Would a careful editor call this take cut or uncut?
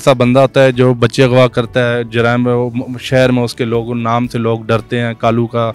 uncut